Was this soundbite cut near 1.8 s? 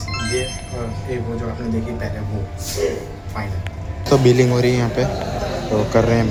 no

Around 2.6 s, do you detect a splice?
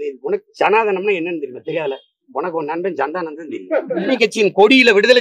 no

